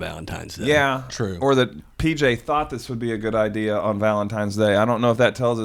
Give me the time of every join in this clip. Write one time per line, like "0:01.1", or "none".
none